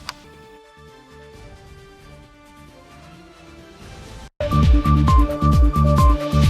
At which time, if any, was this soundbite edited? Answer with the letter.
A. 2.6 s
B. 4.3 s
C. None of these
B